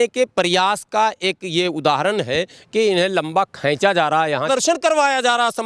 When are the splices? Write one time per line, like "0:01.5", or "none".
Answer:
0:04.5